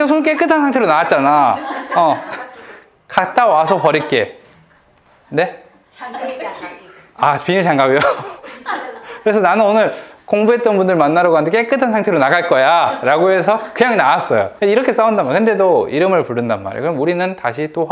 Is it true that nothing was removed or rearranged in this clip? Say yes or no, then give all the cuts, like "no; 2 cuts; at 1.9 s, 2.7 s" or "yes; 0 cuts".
no; 2 cuts; at 10.1 s, 14.5 s